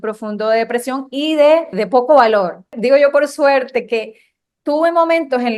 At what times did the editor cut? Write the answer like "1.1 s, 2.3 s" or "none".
1.8 s, 2.7 s